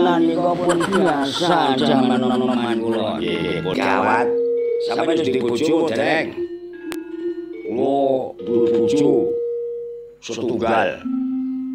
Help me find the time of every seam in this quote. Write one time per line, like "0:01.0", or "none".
0:03.8